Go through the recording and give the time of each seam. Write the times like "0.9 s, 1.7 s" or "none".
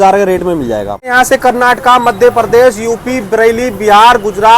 0.9 s